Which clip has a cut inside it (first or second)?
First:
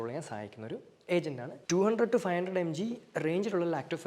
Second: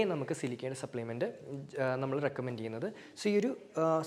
first